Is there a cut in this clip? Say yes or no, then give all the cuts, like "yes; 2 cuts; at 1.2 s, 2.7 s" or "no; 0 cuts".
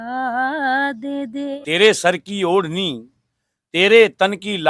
yes; 1 cut; at 1.6 s